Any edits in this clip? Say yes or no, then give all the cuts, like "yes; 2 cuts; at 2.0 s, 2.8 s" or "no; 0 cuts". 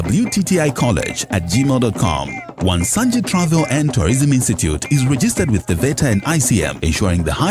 no; 0 cuts